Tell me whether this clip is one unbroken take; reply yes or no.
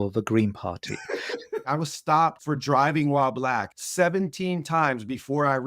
no